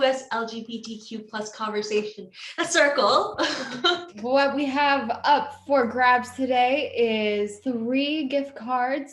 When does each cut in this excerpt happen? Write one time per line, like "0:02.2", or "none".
0:04.1
0:07.6